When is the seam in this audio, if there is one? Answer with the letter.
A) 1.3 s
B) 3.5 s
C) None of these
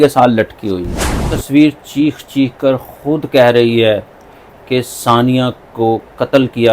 A